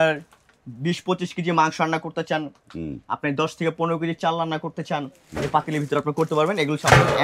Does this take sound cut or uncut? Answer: uncut